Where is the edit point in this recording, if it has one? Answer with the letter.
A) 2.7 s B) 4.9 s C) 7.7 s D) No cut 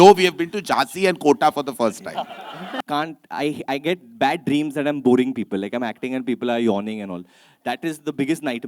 A